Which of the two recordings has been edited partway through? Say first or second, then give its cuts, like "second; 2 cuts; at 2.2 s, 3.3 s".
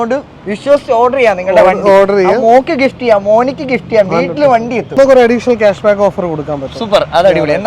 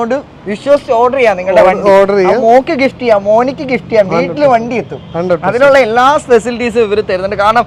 first; 1 cut; at 4.9 s